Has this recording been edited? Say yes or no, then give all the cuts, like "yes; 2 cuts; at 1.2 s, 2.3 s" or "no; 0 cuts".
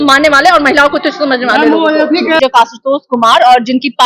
yes; 1 cut; at 2.4 s